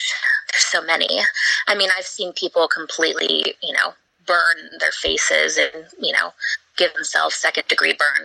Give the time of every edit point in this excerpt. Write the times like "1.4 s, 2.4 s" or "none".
none